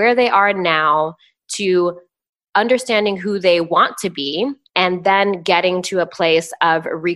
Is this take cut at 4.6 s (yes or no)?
yes